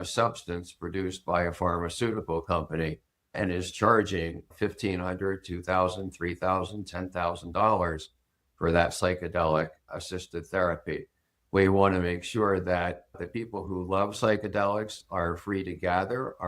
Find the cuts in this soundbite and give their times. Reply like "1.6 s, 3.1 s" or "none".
3.4 s, 4.5 s, 9.9 s, 13.2 s